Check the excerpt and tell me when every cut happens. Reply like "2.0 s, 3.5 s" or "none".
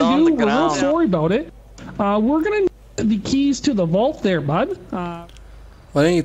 5.0 s